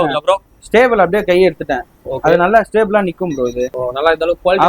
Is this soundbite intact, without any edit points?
no; 1 cut; at 3.7 s

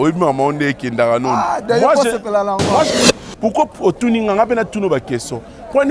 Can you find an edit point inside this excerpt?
yes; 1 cut; at 2.9 s

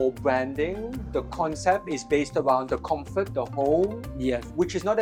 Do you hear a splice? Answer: no; 0 cuts

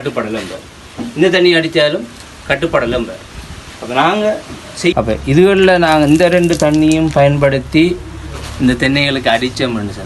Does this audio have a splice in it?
yes; 1 cut; at 4.9 s

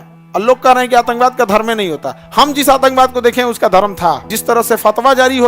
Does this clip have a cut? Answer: yes; 1 cut; at 4.3 s

